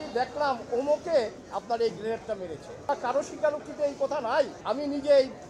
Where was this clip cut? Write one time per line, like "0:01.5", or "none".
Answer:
0:02.9
0:04.6